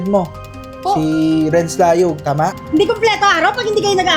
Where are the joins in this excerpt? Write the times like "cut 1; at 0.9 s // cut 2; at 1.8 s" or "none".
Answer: cut 1; at 2.6 s